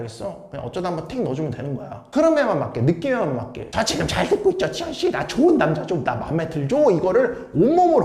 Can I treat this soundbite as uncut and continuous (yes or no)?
yes